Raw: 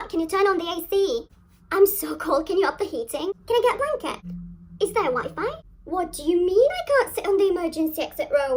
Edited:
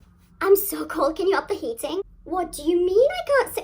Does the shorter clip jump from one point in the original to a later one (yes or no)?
yes